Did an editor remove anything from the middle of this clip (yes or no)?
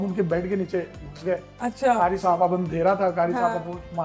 no